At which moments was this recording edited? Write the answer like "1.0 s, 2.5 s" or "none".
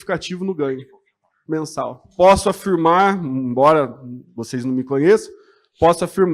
2.0 s